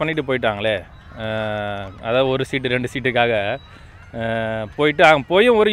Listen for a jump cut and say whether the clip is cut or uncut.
uncut